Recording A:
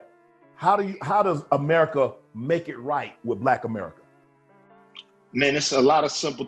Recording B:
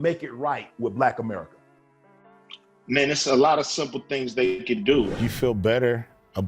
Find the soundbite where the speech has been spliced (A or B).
B